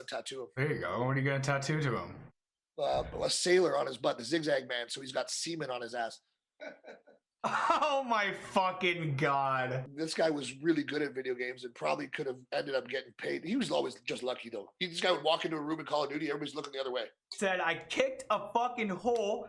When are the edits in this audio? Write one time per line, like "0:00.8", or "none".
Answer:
0:09.9
0:17.2